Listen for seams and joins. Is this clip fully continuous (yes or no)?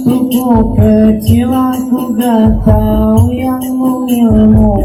yes